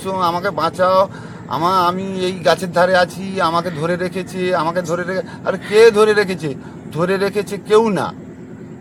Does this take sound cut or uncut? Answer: uncut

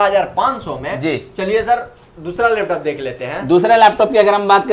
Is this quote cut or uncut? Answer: uncut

